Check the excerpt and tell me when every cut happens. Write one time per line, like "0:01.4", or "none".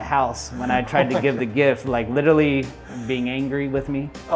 none